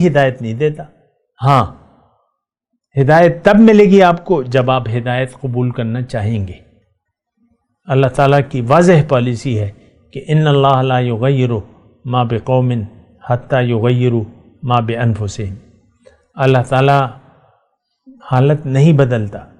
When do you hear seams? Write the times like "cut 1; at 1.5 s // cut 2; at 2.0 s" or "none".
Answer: none